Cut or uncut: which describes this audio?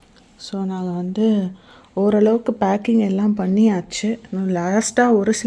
uncut